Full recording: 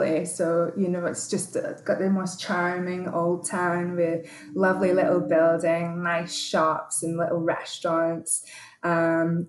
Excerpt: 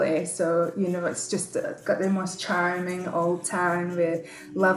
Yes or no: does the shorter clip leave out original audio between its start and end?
no